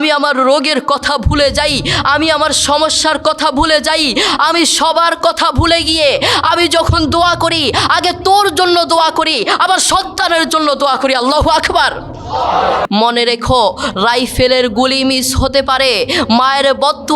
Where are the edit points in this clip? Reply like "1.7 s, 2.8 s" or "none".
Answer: 12.9 s